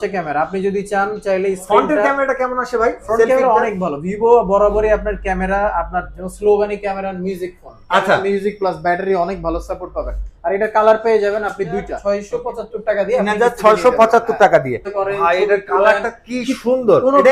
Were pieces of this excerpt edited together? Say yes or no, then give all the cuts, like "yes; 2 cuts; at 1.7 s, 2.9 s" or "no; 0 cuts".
yes; 2 cuts; at 11.9 s, 14.9 s